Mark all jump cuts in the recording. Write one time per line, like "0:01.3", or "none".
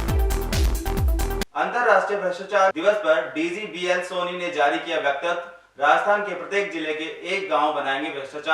0:01.2